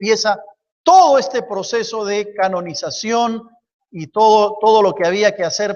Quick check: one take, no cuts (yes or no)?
yes